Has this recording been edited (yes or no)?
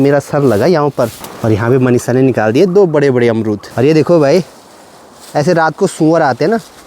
yes